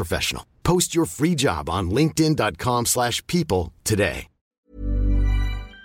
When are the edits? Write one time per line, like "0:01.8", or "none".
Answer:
0:04.7